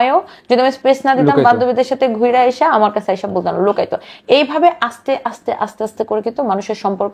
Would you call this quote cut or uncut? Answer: uncut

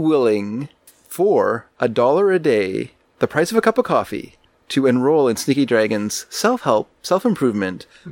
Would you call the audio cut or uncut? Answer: uncut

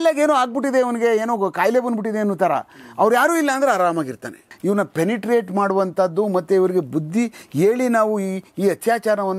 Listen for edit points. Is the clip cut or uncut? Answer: cut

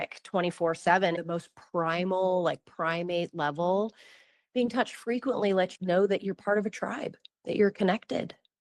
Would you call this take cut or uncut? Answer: cut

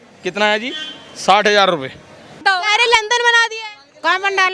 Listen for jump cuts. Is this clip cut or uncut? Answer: cut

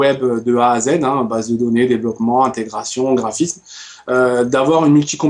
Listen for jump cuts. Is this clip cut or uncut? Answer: uncut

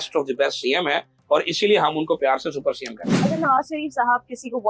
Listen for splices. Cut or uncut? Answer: cut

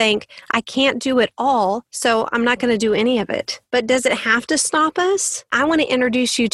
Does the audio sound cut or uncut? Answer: cut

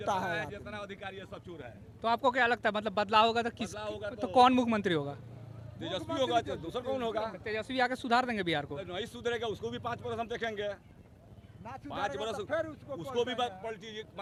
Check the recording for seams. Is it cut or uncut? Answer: uncut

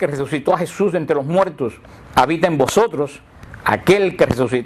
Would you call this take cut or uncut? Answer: cut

